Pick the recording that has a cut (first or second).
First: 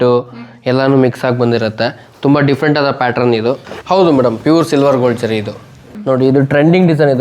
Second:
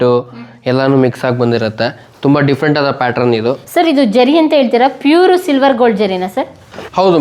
first